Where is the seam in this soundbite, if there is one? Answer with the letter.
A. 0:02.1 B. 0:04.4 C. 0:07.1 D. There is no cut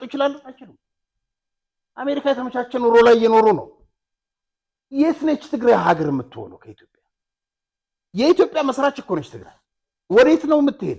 D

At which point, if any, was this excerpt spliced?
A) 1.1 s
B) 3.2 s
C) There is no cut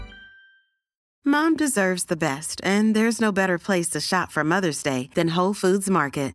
A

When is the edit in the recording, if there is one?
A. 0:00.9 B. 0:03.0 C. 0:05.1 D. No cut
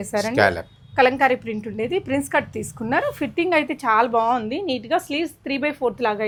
D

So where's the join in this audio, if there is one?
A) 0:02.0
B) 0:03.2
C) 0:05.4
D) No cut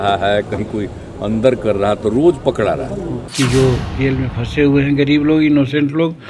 B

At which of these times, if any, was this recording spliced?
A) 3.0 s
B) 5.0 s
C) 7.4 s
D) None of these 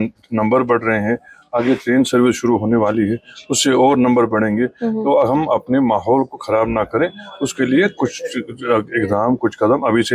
D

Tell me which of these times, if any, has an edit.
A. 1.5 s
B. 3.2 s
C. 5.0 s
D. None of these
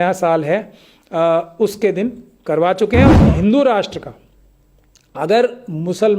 B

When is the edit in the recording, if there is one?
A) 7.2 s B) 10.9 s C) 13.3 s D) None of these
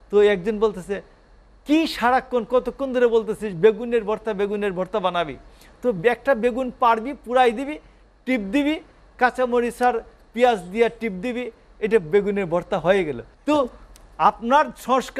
C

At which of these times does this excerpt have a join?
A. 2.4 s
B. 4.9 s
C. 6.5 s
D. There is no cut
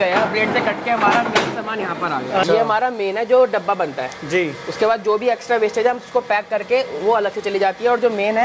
A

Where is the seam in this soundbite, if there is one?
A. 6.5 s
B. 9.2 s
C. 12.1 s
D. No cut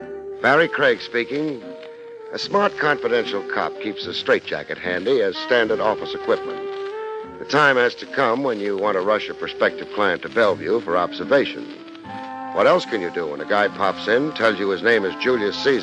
C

